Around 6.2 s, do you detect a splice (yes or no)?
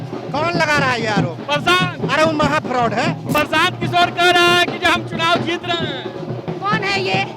no